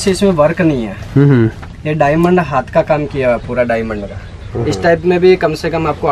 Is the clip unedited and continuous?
yes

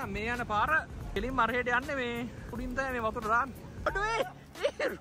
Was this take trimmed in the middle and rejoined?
yes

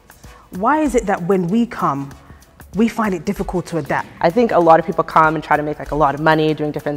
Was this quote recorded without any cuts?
no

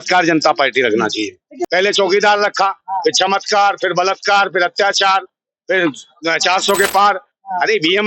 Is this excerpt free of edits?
no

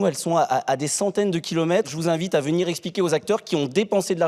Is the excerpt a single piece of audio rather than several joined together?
no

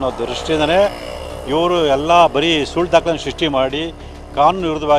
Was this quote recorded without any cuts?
yes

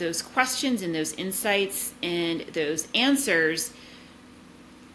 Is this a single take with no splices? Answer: yes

